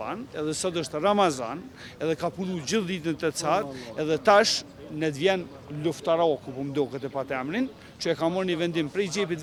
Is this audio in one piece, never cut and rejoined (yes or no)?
yes